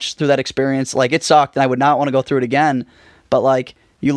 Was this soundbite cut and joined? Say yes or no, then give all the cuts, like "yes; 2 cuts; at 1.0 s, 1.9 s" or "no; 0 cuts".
no; 0 cuts